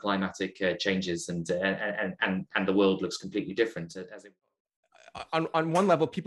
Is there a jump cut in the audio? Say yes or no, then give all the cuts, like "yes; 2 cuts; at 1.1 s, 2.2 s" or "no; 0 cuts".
yes; 1 cut; at 4.7 s